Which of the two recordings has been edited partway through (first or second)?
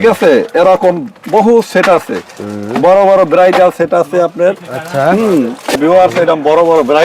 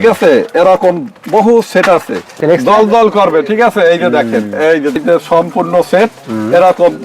second